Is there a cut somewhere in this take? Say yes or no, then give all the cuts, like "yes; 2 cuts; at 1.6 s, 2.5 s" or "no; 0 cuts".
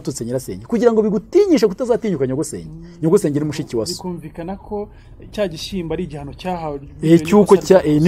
no; 0 cuts